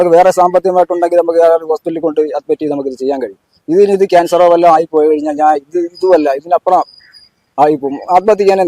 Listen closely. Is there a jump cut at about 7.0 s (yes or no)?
no